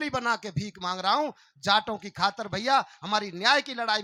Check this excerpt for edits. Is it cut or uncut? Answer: uncut